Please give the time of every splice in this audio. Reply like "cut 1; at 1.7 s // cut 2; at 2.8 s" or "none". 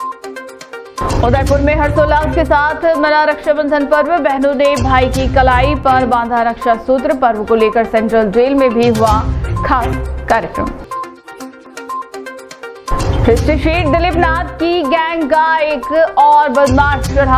cut 1; at 1.0 s